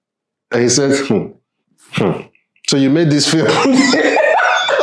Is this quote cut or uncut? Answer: uncut